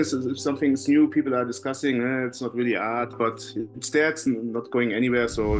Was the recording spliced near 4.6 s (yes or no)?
no